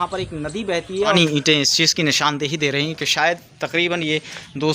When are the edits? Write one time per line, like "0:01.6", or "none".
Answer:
0:01.1